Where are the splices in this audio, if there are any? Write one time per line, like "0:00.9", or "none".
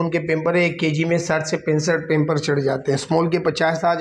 none